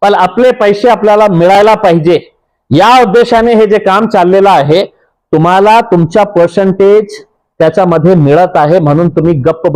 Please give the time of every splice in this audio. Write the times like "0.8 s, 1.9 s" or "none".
none